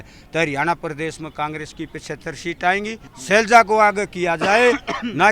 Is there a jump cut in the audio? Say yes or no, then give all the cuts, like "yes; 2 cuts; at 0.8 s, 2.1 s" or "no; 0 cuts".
yes; 1 cut; at 3.1 s